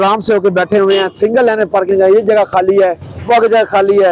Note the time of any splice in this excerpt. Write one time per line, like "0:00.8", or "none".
none